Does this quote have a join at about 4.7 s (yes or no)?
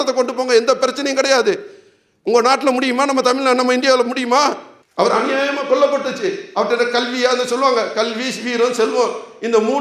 yes